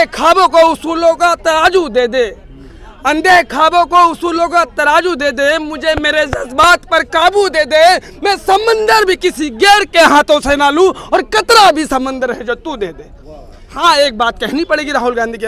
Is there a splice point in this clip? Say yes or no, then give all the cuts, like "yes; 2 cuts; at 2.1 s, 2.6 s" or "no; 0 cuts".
yes; 1 cut; at 13.6 s